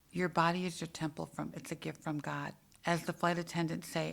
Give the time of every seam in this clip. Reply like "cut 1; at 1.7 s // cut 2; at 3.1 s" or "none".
cut 1; at 2.6 s